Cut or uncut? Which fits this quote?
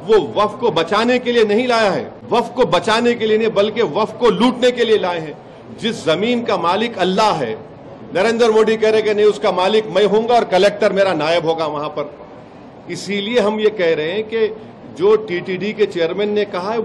cut